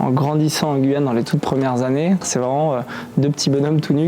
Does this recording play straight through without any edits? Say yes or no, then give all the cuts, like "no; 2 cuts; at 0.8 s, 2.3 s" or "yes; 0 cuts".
no; 1 cut; at 2.2 s